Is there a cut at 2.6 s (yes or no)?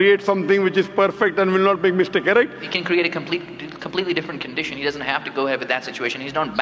yes